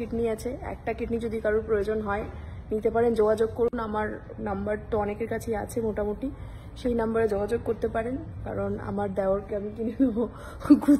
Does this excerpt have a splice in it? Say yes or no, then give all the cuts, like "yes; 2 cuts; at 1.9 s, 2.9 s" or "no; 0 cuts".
no; 0 cuts